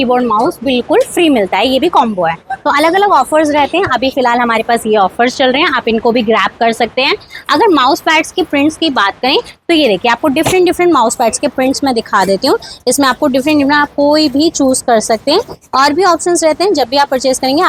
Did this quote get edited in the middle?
no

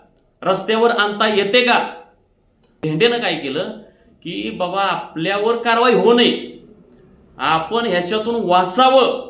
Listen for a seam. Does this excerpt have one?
yes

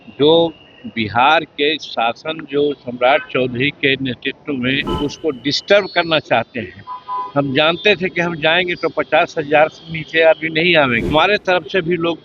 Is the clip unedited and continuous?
no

